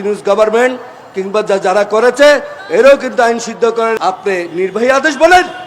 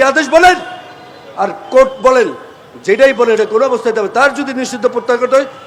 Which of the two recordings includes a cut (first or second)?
first